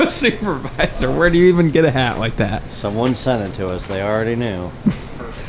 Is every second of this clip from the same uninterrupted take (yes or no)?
yes